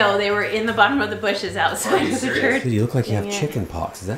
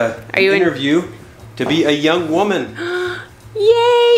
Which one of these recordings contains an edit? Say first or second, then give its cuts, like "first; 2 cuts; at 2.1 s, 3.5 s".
first; 1 cut; at 2.6 s